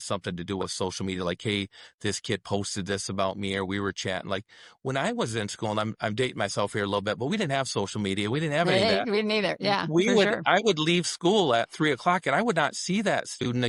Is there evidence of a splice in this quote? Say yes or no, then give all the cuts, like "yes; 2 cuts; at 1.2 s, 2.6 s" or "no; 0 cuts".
no; 0 cuts